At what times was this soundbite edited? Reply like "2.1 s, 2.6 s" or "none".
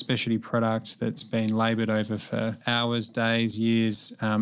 2.6 s